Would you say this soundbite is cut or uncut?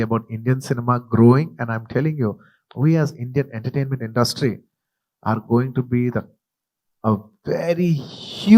cut